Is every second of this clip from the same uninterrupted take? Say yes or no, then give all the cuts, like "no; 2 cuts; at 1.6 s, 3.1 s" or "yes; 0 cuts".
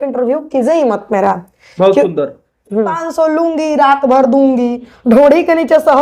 no; 1 cut; at 3.1 s